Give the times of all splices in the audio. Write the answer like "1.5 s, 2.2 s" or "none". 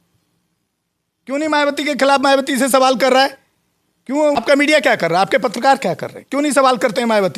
4.4 s